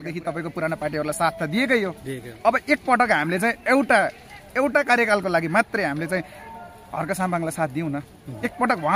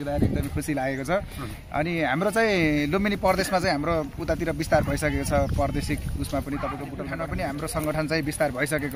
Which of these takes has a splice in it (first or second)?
second